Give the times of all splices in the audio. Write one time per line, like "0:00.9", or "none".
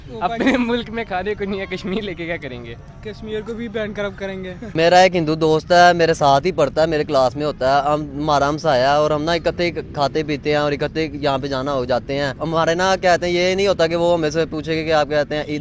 0:04.7
0:12.4